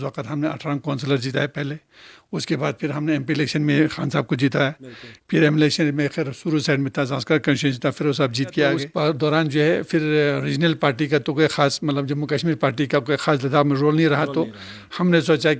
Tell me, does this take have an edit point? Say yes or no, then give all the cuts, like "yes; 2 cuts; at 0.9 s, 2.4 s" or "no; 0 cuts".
yes; 1 cut; at 8.9 s